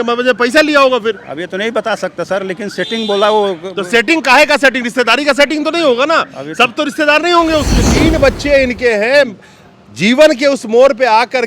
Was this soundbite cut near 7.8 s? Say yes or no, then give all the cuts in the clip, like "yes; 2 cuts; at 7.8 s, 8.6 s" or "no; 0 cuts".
yes; 1 cut; at 7.8 s